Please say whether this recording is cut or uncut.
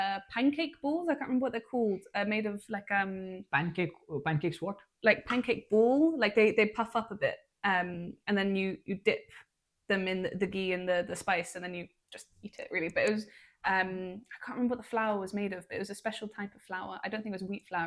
uncut